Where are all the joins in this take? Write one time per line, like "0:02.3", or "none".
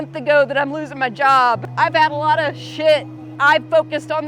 0:01.7
0:03.3